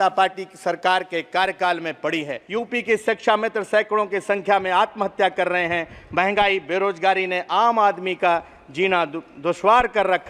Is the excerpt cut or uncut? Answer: cut